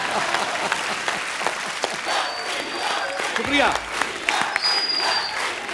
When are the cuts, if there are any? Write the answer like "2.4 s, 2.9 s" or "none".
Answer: 2.0 s